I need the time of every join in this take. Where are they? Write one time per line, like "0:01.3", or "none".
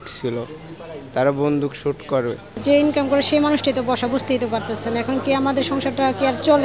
0:02.6